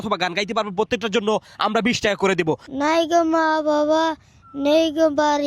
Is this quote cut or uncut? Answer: cut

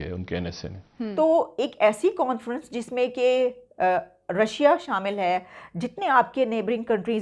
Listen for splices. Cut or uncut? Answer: cut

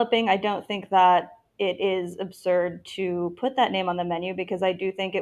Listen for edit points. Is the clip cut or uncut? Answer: uncut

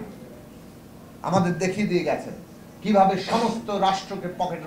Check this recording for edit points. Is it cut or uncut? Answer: uncut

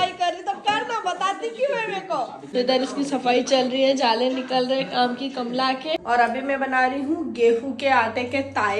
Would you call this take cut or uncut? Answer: cut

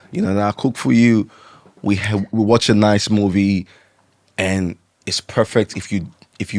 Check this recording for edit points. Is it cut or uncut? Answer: uncut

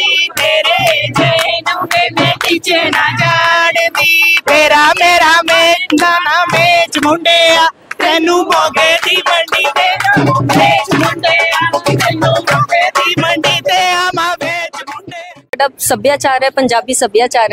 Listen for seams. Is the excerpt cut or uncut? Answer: cut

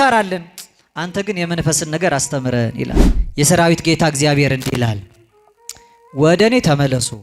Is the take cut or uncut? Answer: cut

